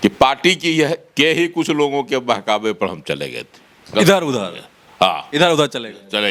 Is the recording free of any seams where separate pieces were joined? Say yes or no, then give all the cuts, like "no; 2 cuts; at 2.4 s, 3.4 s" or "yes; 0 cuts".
yes; 0 cuts